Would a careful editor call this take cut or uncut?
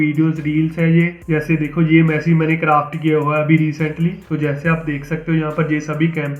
cut